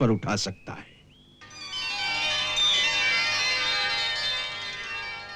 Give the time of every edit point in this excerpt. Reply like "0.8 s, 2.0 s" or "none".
none